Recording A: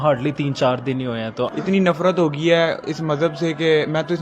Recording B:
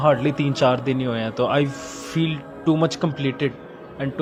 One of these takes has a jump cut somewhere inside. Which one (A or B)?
A